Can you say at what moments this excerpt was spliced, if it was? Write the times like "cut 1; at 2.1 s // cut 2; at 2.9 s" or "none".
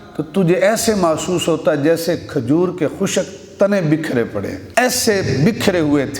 none